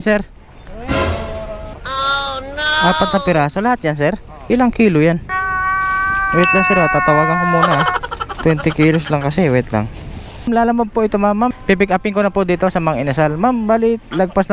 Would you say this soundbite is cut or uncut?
cut